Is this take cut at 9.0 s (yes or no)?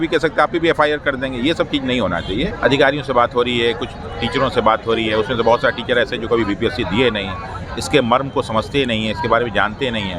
no